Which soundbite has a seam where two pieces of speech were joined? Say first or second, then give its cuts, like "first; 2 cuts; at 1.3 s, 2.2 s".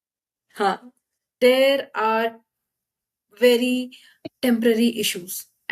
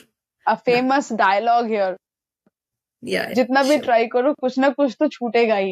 first; 1 cut; at 1.2 s